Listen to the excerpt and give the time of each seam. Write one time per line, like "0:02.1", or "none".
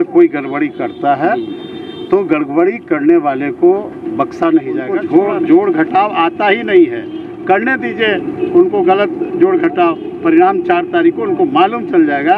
0:05.0